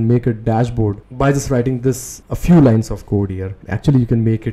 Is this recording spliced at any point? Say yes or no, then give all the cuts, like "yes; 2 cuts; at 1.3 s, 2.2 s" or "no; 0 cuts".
yes; 1 cut; at 3.6 s